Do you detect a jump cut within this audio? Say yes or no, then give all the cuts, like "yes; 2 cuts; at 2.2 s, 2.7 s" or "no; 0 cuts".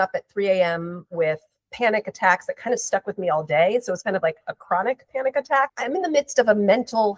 yes; 1 cut; at 5.7 s